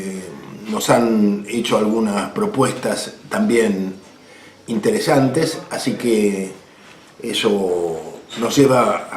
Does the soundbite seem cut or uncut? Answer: cut